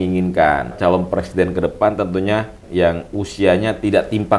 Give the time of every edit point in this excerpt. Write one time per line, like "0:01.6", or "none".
0:00.8
0:02.6